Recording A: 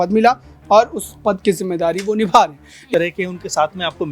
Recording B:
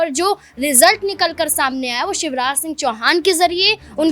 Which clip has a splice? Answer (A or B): A